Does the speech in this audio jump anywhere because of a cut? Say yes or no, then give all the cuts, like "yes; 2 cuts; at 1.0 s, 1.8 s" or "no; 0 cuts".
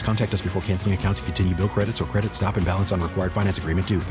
no; 0 cuts